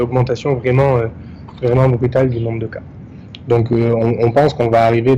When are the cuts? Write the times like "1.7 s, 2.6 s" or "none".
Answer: none